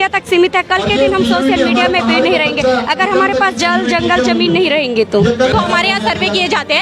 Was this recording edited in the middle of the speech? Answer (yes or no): yes